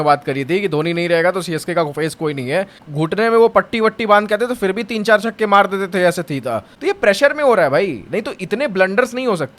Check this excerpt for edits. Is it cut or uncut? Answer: cut